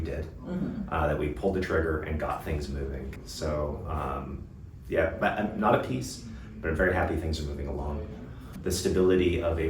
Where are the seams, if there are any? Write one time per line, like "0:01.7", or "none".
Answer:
0:03.1
0:08.6